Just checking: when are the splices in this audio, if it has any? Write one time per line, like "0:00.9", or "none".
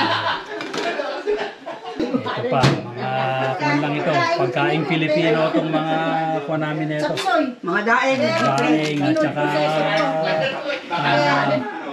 0:02.0

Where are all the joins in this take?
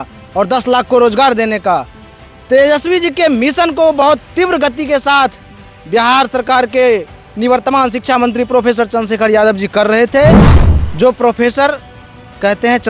0:10.5

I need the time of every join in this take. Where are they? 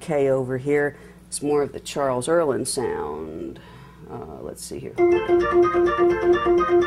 none

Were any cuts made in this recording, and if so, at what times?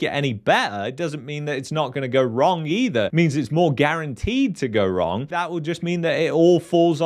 0:05.3

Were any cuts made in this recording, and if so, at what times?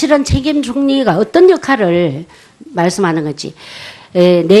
0:01.2

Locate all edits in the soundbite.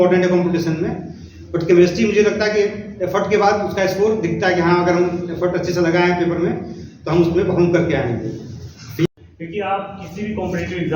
0:09.1

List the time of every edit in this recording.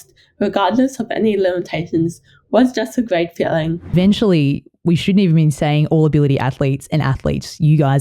0:03.9

